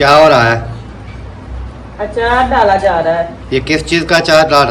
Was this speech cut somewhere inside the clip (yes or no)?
no